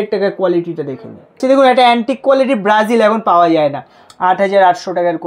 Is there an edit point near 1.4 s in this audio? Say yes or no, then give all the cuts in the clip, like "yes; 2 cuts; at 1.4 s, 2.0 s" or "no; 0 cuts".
yes; 1 cut; at 1.4 s